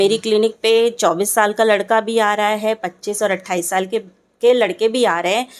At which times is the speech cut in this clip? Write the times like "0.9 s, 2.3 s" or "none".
none